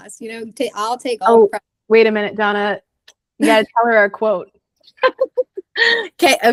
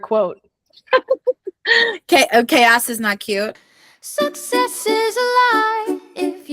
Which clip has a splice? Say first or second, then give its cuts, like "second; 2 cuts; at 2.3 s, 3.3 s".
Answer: second; 1 cut; at 3.6 s